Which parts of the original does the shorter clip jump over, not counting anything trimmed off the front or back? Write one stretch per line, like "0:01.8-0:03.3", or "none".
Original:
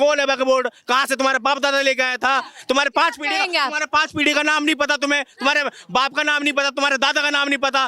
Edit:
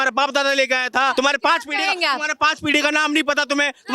0:02.4-0:02.7